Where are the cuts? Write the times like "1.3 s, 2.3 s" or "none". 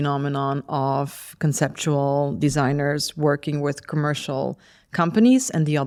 none